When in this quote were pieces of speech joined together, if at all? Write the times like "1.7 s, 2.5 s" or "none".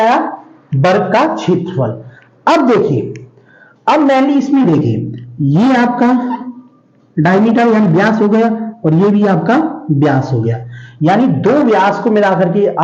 none